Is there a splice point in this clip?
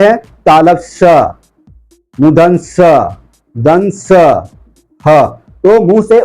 no; 0 cuts

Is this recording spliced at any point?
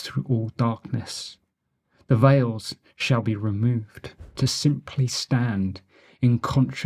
yes; 1 cut; at 4.3 s

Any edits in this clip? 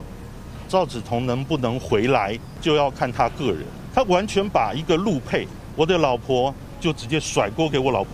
yes; 4 cuts; at 2.5 s, 3.7 s, 5.6 s, 6.7 s

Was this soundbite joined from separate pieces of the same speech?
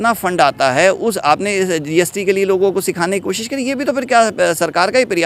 no; 0 cuts

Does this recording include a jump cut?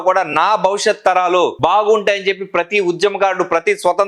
no; 0 cuts

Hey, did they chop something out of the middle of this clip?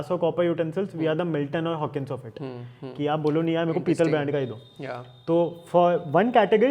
no; 0 cuts

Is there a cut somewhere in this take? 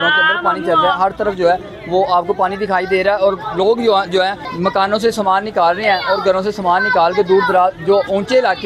no; 0 cuts

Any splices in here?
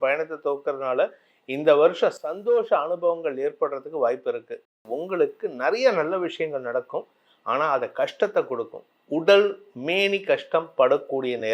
yes; 1 cut; at 4.8 s

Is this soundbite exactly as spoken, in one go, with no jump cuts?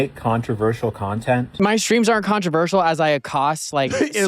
no; 1 cut; at 1.5 s

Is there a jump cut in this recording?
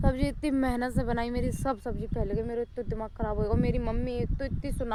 no; 0 cuts

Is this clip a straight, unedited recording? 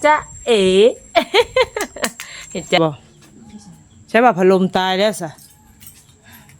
no; 1 cut; at 2.8 s

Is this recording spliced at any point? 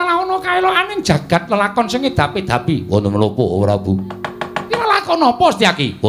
yes; 1 cut; at 4.7 s

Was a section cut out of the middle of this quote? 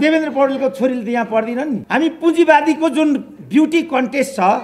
yes; 1 cut; at 1.8 s

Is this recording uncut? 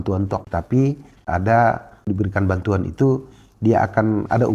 yes; 0 cuts

